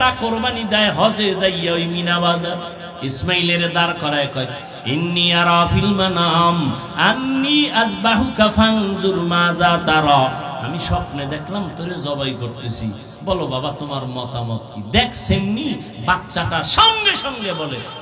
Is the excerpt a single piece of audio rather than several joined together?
no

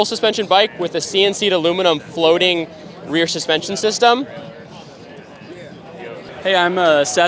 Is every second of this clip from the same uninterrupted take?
yes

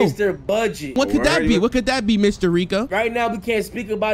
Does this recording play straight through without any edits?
no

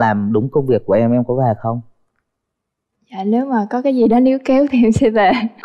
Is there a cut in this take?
no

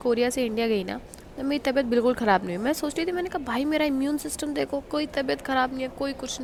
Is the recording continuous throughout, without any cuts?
yes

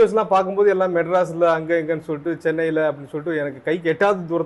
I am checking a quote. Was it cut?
no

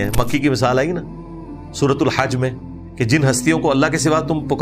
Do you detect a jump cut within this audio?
no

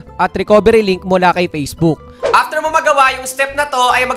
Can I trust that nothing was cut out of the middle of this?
no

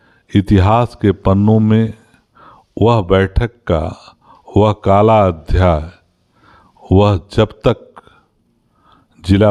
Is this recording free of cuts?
yes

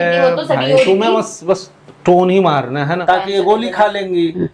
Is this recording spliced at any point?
yes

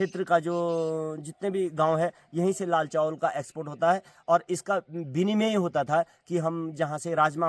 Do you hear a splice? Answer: no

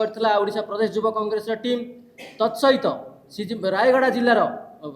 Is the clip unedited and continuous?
yes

